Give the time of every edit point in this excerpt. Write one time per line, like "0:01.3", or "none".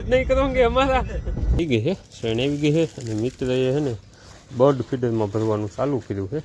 0:01.6